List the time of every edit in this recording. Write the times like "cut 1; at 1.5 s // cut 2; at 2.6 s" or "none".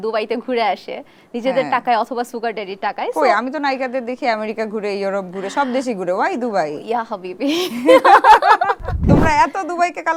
cut 1; at 9.0 s